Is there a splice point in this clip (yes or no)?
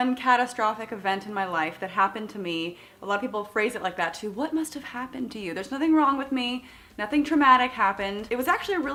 no